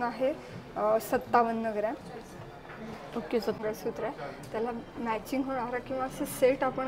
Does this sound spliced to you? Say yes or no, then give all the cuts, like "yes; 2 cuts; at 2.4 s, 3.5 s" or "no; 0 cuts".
yes; 1 cut; at 3.6 s